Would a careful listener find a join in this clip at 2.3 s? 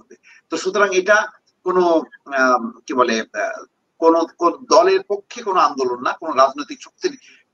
no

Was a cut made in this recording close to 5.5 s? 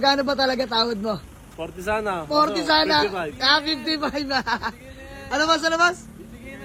no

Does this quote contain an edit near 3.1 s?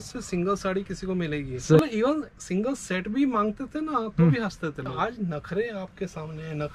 no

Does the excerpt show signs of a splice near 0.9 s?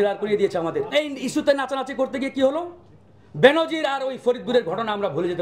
yes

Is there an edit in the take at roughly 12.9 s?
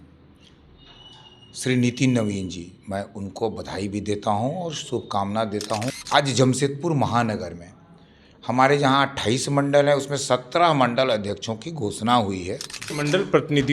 yes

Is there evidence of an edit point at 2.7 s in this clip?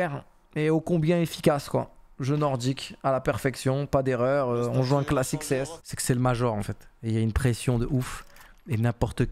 no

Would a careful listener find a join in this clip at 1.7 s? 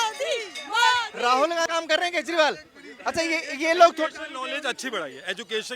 yes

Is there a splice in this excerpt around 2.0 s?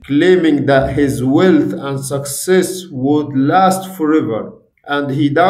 no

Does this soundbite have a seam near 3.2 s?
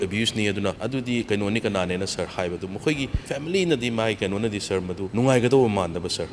yes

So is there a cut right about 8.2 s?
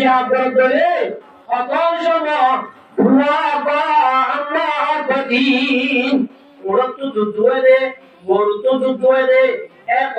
no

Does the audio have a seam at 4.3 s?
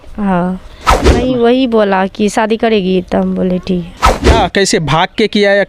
yes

